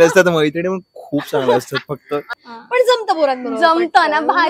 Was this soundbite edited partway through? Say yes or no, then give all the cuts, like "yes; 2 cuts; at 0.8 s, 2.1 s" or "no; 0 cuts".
yes; 1 cut; at 2.3 s